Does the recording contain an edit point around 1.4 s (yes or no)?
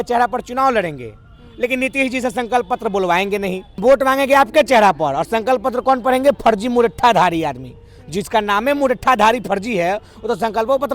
no